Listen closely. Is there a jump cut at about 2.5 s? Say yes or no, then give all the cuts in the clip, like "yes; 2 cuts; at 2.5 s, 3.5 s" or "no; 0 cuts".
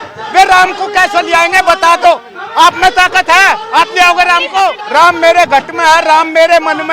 no; 1 cut; at 4.8 s